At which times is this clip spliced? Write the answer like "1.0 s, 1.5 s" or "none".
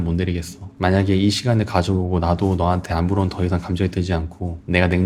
none